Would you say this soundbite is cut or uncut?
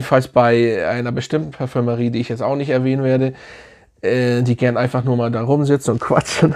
uncut